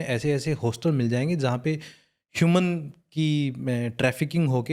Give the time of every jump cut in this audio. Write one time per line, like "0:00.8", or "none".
none